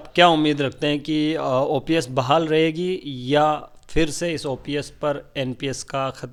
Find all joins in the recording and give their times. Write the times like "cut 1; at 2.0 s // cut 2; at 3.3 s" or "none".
none